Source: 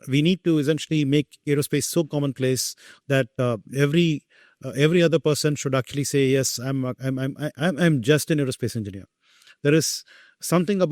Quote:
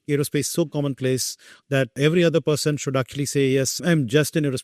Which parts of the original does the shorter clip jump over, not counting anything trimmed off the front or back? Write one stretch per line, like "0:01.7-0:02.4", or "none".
0:03.3-0:04.7
0:06.6-0:07.8